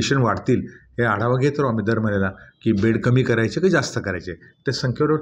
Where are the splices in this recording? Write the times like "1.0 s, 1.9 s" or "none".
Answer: none